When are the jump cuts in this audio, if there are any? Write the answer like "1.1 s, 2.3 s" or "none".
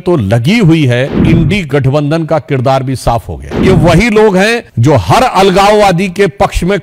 1.2 s, 3.6 s, 4.7 s